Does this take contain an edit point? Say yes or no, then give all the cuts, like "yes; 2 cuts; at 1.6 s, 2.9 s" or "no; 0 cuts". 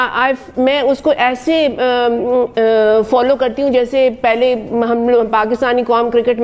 no; 0 cuts